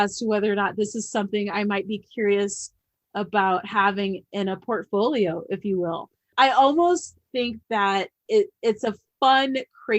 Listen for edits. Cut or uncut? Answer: uncut